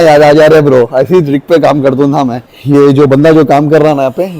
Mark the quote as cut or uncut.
uncut